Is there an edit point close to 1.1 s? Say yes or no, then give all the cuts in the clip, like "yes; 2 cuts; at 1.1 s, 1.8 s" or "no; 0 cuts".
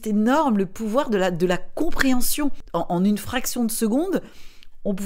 no; 1 cut; at 2.6 s